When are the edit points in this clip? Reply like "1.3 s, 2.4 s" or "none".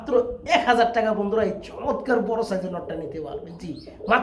none